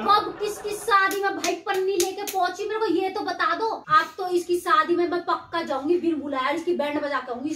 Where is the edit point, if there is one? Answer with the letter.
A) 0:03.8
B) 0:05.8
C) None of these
A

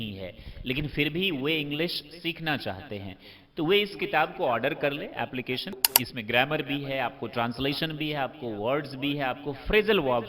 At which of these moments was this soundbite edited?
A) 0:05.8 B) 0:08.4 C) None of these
A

